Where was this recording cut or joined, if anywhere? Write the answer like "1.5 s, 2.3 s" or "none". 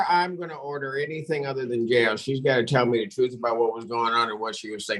none